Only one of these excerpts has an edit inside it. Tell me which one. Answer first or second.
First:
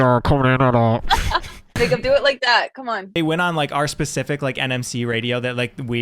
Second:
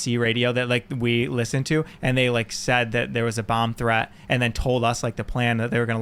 first